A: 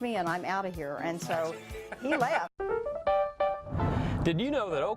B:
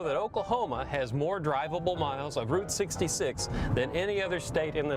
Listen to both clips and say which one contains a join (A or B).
A